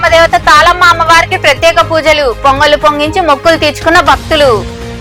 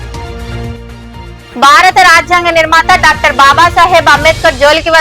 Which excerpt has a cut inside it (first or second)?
second